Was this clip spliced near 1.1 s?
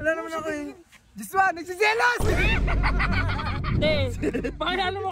no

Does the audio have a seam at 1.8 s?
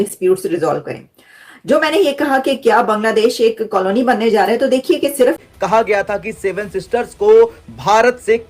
no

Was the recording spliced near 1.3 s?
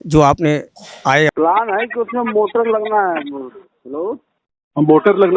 yes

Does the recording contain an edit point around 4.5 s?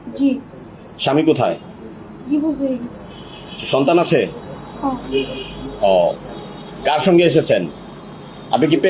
no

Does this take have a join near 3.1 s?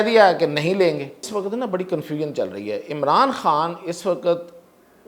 no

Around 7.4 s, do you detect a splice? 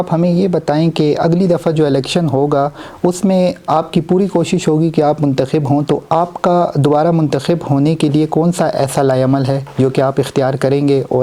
no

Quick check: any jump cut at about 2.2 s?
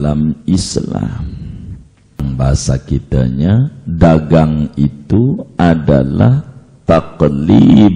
yes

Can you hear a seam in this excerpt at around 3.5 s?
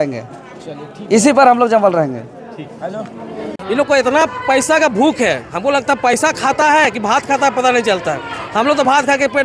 yes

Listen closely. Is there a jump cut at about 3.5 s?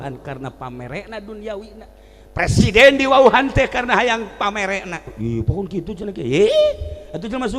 no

